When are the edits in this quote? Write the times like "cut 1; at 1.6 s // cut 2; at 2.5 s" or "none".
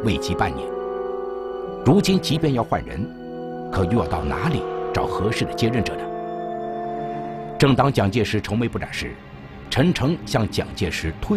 cut 1; at 3.1 s